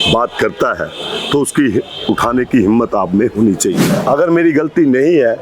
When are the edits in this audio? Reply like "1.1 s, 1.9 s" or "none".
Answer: 3.9 s